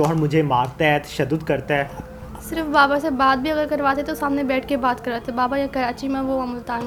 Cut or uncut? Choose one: uncut